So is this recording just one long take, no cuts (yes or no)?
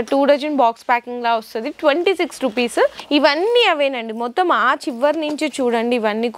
no